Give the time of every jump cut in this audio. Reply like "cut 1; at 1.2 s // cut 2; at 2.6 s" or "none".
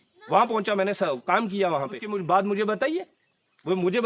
cut 1; at 2.0 s